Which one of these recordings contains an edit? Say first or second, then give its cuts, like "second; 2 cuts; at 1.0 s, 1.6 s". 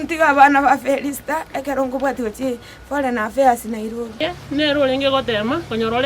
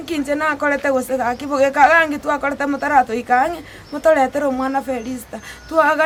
first; 1 cut; at 4.3 s